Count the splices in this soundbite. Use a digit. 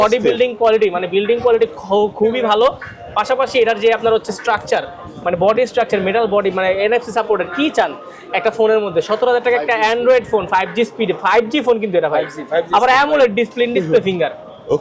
0